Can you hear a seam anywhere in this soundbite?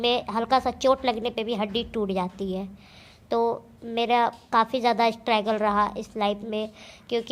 no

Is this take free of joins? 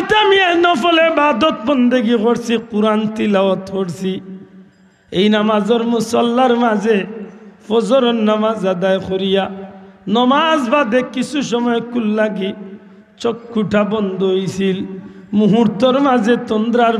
yes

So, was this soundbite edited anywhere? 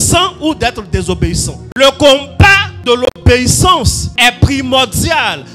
yes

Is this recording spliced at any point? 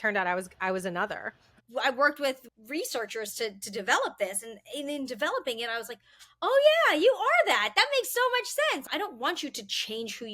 yes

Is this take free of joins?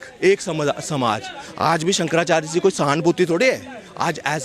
yes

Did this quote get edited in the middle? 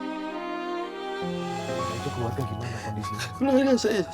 yes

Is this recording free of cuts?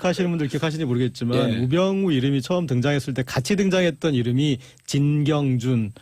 yes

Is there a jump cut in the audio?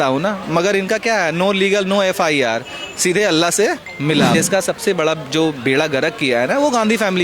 yes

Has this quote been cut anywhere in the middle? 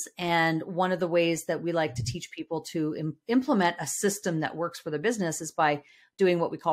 no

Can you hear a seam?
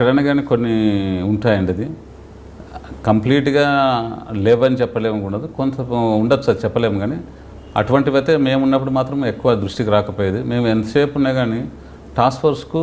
no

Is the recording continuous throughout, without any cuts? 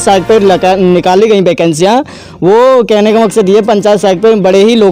yes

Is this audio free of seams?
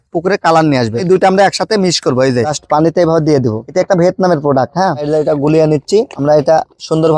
no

